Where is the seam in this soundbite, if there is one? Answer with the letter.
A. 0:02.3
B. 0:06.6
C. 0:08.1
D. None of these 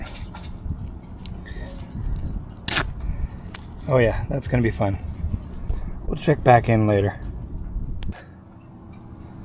C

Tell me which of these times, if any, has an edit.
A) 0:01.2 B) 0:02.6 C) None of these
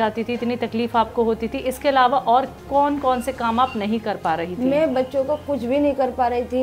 B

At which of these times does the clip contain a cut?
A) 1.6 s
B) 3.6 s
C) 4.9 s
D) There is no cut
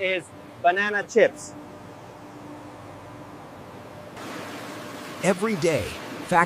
D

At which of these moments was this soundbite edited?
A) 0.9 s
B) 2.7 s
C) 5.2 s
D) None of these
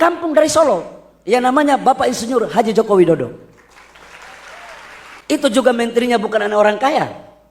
C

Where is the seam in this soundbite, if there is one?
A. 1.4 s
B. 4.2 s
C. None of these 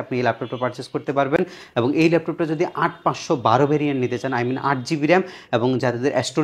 C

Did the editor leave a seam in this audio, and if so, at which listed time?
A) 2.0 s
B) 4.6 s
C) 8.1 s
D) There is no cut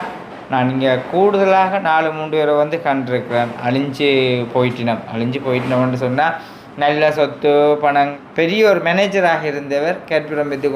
C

